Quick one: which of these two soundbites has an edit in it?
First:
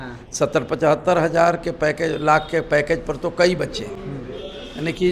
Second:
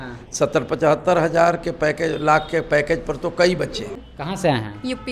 second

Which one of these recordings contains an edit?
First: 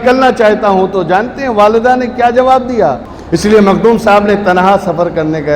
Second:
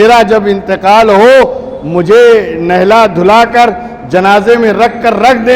first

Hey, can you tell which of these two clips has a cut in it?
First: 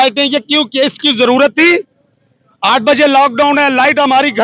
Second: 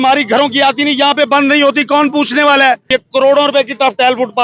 second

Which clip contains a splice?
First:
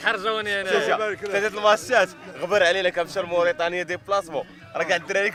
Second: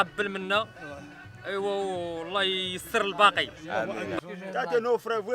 second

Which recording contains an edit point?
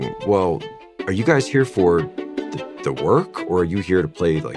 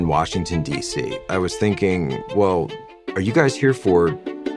second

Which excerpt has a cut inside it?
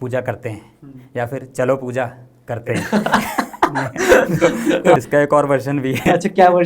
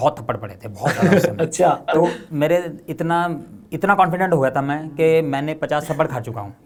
first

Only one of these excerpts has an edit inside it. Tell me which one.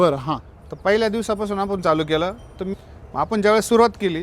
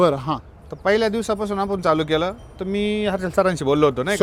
first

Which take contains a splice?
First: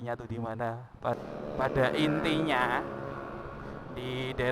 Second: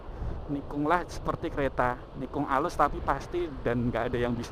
first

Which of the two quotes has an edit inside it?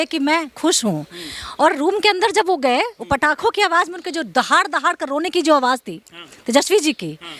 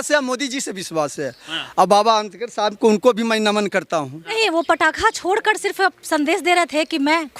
second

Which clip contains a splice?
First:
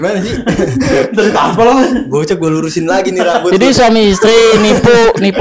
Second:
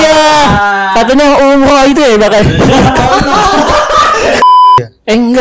second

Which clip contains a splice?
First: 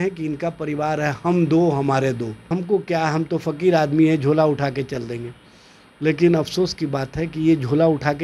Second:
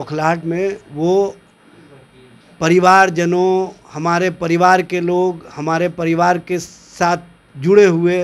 first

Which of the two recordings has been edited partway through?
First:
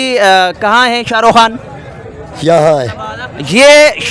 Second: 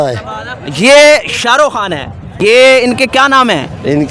second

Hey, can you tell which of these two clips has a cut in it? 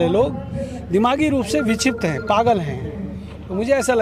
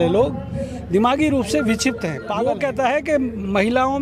second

